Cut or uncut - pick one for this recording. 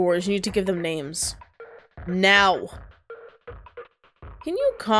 uncut